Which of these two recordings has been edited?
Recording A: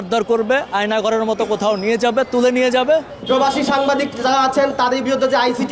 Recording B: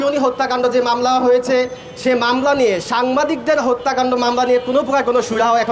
A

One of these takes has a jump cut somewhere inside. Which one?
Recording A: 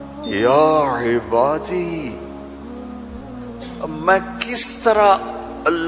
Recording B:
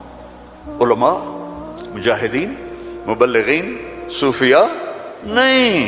A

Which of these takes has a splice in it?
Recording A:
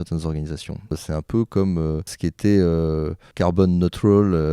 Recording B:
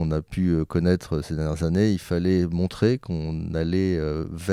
A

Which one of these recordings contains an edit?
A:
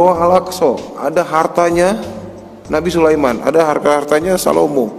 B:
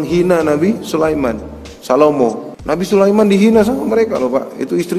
B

